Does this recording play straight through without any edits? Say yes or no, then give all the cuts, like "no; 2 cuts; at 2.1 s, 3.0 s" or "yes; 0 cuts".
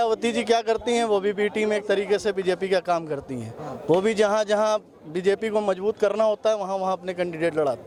yes; 0 cuts